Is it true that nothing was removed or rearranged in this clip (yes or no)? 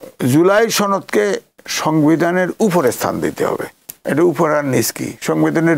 yes